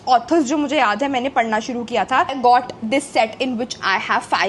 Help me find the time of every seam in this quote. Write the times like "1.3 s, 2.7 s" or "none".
2.3 s